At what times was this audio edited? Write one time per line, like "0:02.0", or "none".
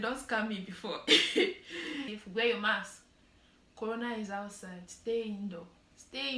0:02.1